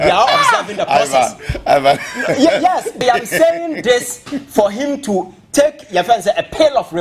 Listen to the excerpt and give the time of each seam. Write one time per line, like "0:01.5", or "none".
0:03.0